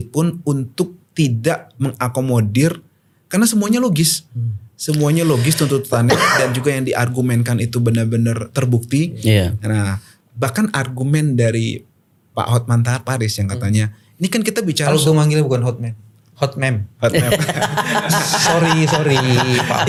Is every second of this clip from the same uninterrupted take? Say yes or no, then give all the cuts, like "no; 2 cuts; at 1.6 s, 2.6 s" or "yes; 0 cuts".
yes; 0 cuts